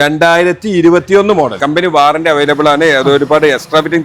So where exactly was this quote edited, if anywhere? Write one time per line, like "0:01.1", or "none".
0:01.6